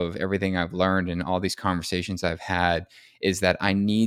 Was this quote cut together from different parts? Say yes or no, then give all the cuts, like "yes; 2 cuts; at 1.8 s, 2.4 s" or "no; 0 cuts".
no; 0 cuts